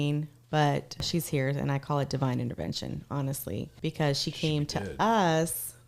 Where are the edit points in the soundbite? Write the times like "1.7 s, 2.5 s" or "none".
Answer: 1.1 s, 3.7 s